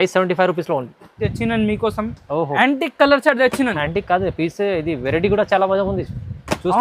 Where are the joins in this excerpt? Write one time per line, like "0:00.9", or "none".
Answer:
0:01.1